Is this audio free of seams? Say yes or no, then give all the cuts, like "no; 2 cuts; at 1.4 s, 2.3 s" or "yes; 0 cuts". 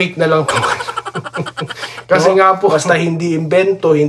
no; 1 cut; at 2.7 s